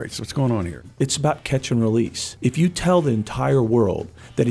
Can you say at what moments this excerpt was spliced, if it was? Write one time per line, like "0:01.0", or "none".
0:00.9
0:02.2